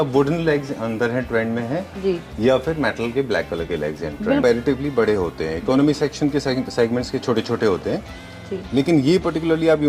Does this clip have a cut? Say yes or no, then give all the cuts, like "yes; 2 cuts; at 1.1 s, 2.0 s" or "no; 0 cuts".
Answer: yes; 1 cut; at 4.4 s